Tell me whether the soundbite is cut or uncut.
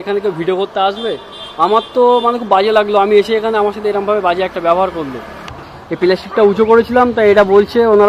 cut